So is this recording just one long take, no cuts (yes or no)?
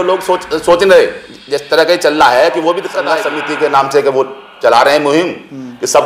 no